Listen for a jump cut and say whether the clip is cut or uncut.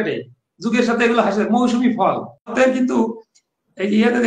cut